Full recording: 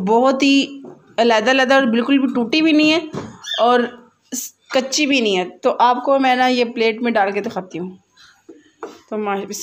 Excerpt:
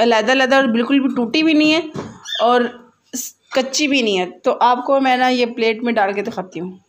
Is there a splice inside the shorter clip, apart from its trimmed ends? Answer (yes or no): no